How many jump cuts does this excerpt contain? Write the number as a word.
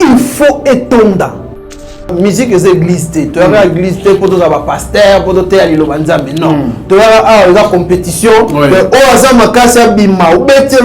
one